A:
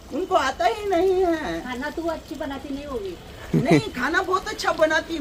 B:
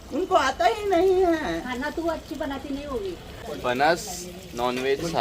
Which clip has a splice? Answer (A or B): B